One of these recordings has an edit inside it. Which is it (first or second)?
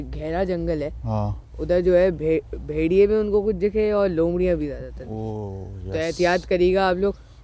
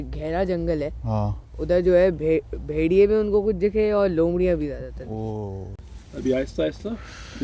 second